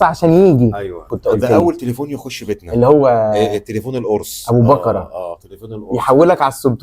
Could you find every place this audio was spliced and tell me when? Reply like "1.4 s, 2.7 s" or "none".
1.1 s